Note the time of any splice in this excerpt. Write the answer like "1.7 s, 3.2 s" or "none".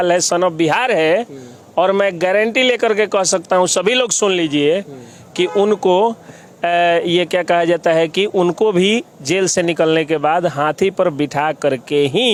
none